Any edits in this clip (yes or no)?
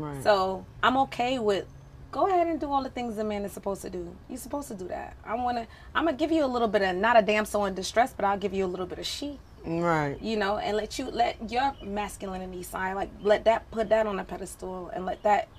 no